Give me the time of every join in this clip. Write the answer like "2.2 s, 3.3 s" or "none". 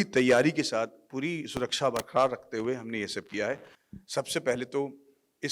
3.8 s